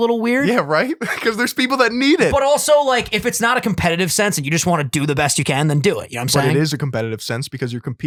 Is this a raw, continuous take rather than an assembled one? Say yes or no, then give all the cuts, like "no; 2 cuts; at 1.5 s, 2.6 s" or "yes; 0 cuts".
yes; 0 cuts